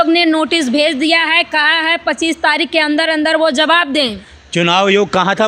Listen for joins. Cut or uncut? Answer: uncut